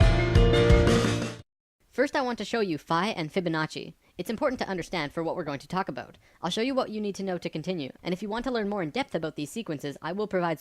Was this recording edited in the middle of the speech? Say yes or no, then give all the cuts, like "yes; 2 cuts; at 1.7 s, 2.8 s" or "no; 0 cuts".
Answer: no; 0 cuts